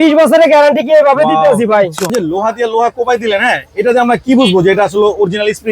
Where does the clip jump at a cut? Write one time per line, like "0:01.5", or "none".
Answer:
0:02.1